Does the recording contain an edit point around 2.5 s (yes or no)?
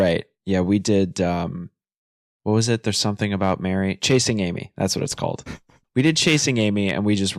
yes